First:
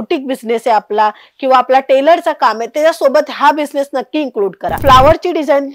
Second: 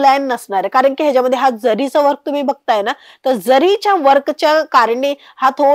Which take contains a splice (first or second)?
first